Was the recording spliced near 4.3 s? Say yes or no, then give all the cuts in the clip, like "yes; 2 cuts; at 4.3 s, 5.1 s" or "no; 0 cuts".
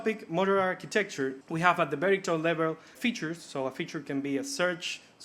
no; 2 cuts; at 1.4 s, 2.9 s